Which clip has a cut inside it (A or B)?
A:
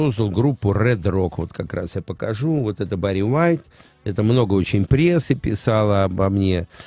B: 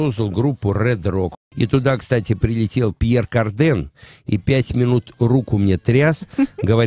B